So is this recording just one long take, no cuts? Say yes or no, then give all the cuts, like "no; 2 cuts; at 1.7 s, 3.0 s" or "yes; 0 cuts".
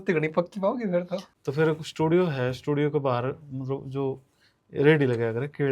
no; 1 cut; at 1.3 s